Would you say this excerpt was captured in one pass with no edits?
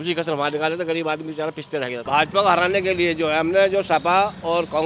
no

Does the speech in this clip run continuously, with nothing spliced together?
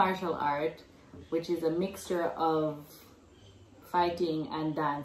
yes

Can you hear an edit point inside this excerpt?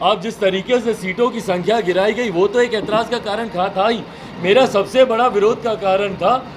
no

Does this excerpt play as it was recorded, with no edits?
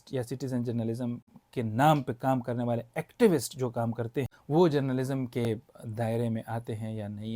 no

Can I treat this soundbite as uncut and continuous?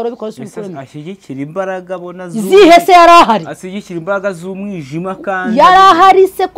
yes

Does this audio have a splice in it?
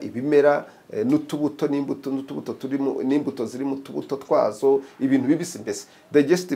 no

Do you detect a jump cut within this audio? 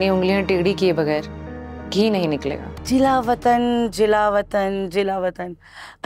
yes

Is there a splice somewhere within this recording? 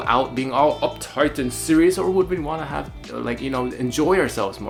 no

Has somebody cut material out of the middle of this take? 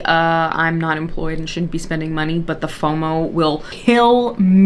no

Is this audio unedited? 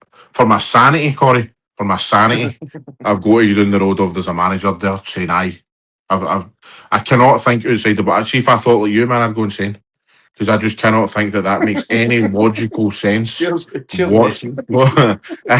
yes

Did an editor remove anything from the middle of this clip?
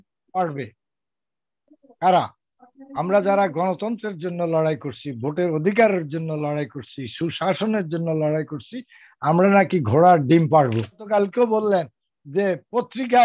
yes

